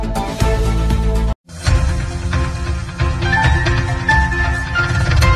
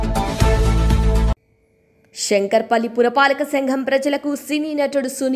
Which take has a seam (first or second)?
second